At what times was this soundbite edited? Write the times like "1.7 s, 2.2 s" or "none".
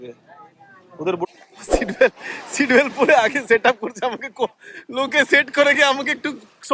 1.3 s